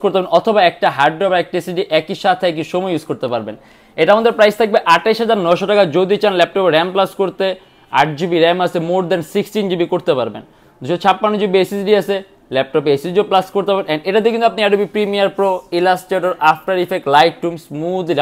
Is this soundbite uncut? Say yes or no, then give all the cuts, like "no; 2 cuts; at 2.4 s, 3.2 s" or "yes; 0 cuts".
yes; 0 cuts